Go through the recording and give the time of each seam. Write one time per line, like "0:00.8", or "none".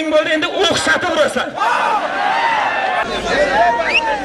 0:03.0

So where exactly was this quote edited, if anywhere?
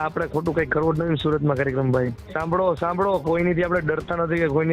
0:02.3

